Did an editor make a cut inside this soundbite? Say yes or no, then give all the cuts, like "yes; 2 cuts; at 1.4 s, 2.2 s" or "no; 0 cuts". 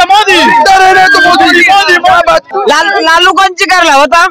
yes; 1 cut; at 2.5 s